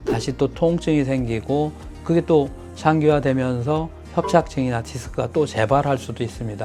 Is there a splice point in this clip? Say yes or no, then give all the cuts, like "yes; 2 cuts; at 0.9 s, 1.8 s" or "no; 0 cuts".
no; 0 cuts